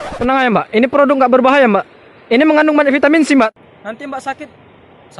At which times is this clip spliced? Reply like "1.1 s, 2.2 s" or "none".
3.5 s